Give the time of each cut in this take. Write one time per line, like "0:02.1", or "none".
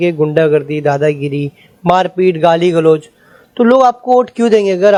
none